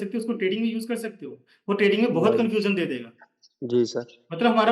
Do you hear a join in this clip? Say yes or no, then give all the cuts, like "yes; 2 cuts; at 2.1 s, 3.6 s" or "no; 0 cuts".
no; 0 cuts